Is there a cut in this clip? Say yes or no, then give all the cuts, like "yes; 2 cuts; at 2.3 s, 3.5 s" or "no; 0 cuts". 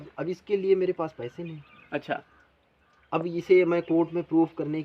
no; 0 cuts